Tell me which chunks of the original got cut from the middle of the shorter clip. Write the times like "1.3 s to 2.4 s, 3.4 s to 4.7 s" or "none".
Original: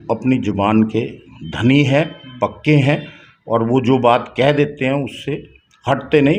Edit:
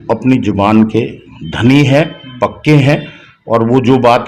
none